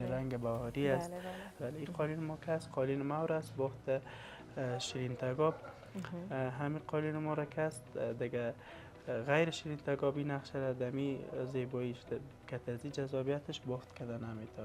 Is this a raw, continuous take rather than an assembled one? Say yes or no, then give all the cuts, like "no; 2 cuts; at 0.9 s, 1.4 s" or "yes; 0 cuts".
no; 1 cut; at 1.6 s